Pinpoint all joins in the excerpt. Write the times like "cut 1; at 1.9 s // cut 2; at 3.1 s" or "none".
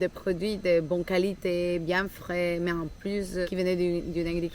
cut 1; at 3.5 s

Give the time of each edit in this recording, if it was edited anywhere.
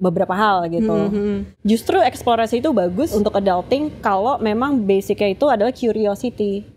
cut 1; at 1.5 s // cut 2; at 3.1 s

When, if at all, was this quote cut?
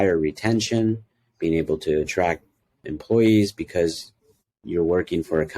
cut 1; at 2.8 s

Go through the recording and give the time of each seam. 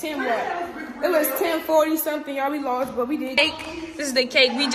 cut 1; at 3.4 s

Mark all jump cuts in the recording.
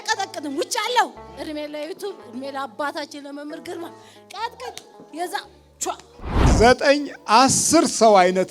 cut 1; at 6.4 s

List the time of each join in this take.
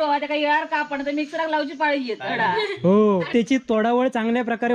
cut 1; at 3.3 s

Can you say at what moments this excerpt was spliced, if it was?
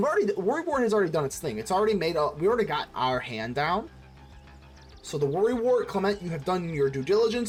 none

